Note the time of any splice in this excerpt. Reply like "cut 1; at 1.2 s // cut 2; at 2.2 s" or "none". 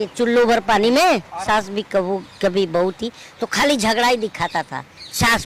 cut 1; at 1.4 s